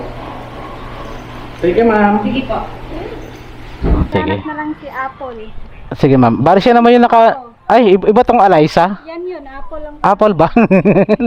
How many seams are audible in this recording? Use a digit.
1